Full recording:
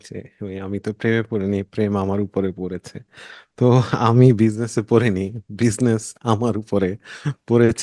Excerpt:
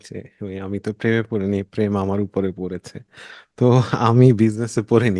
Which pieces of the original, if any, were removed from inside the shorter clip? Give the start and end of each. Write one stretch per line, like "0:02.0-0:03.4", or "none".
none